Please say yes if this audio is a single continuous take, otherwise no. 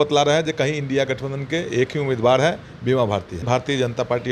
no